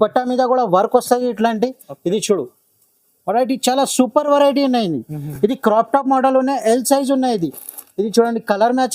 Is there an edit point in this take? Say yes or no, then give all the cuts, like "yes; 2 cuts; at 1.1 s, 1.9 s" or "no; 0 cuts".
no; 0 cuts